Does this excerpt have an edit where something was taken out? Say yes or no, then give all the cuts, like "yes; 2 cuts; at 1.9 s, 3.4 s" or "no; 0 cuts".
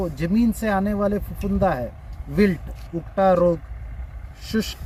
no; 0 cuts